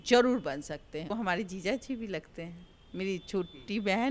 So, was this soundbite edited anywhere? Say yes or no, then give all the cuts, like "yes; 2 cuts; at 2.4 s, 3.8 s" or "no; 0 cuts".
yes; 1 cut; at 1.1 s